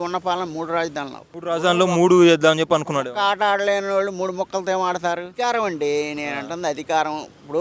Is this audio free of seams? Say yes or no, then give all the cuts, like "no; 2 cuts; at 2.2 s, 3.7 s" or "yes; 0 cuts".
no; 2 cuts; at 1.3 s, 5.3 s